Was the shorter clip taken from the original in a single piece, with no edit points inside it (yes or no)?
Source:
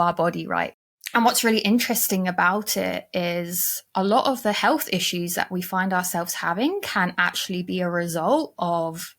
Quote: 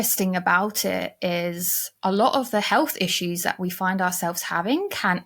yes